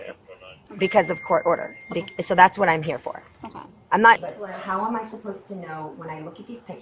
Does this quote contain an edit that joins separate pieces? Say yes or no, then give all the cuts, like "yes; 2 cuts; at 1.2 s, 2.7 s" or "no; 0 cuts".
yes; 1 cut; at 4.2 s